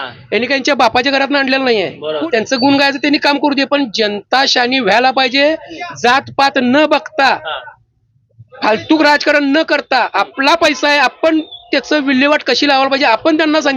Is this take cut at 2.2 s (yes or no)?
yes